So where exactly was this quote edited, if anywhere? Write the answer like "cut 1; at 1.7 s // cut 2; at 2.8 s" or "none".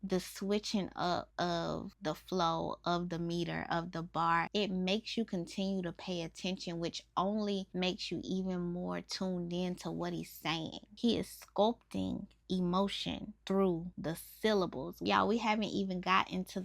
cut 1; at 10.8 s // cut 2; at 13.3 s // cut 3; at 13.9 s // cut 4; at 14.9 s